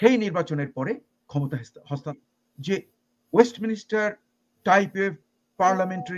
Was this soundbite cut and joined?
yes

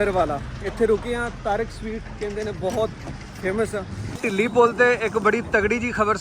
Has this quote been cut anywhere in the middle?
yes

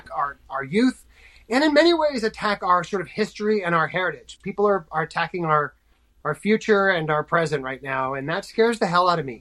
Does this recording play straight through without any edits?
yes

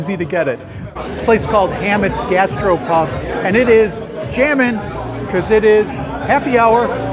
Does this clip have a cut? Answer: yes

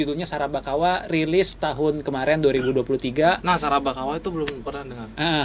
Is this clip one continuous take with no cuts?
yes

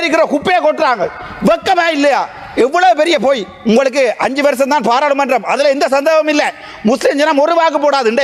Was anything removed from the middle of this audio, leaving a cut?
no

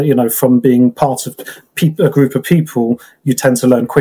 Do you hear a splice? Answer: no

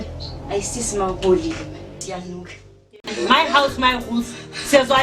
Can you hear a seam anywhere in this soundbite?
yes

